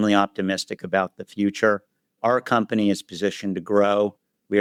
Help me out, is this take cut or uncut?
uncut